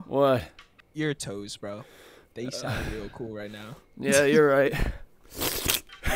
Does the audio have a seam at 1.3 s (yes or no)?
no